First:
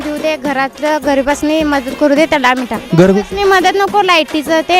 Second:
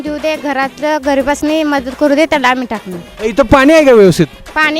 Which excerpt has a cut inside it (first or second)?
first